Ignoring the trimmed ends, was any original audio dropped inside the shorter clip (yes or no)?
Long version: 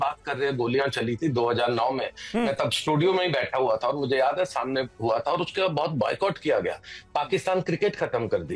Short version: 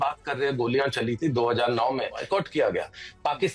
yes